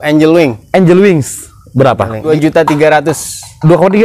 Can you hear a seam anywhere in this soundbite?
yes; 1 cut; at 2.3 s

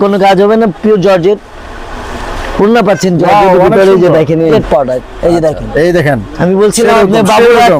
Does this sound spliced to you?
yes; 1 cut; at 4.5 s

